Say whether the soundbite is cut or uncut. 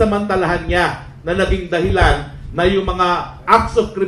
uncut